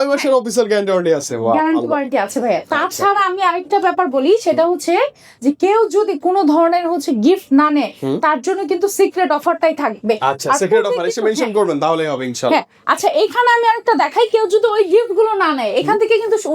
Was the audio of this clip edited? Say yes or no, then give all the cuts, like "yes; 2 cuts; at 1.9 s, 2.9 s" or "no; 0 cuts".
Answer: no; 0 cuts